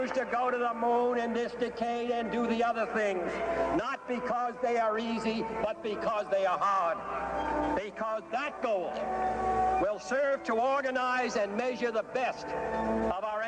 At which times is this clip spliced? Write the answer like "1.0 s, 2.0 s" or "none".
none